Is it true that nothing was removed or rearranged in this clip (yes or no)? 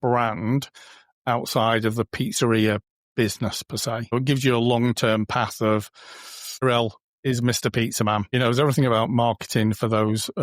no